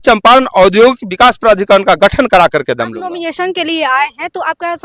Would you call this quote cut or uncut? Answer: uncut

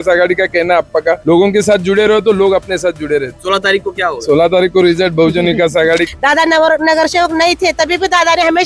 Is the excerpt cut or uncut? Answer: cut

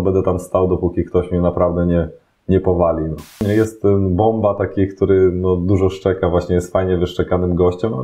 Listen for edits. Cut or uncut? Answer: cut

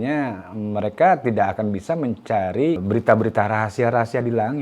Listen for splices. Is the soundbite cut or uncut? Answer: cut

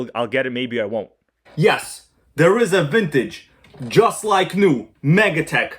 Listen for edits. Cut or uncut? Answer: cut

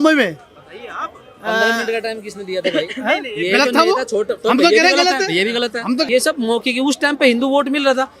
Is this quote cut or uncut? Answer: cut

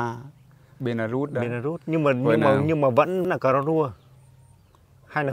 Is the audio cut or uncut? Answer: cut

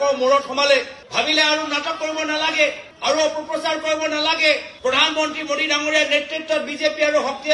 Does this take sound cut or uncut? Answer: uncut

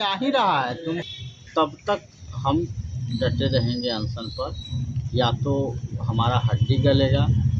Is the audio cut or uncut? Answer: cut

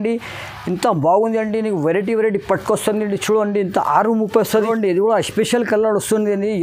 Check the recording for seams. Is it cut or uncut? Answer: cut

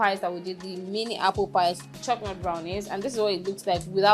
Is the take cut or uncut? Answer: cut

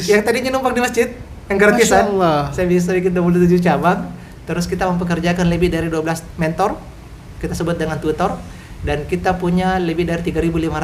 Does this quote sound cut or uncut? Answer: uncut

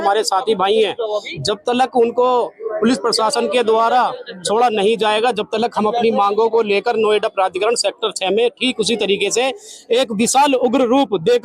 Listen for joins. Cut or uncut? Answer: uncut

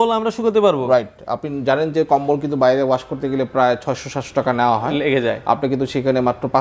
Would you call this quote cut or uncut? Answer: uncut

